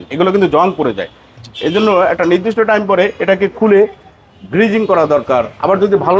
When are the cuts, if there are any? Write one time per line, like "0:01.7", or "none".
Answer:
none